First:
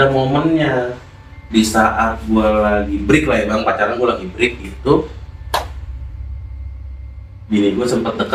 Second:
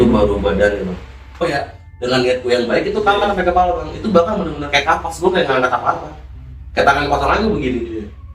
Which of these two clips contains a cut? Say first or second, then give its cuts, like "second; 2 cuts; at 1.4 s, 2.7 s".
second; 1 cut; at 1.4 s